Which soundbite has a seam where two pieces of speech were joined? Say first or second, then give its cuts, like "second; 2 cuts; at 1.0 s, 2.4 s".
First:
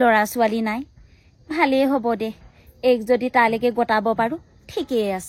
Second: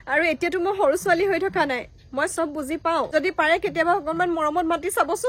second; 1 cut; at 3.1 s